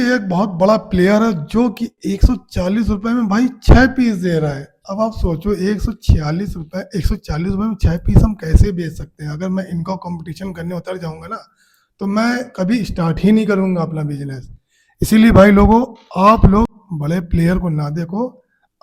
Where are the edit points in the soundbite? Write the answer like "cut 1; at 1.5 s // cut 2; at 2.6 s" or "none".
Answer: none